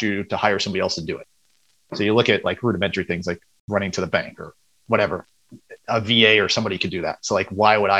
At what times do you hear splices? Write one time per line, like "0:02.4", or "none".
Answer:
0:03.5